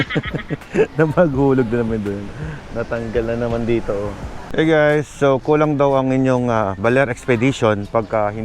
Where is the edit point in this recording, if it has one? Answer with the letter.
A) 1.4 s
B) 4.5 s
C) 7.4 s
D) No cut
B